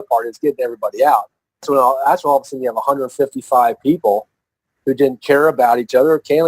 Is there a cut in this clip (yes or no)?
yes